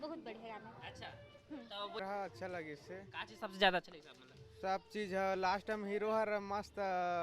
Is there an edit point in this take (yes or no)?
yes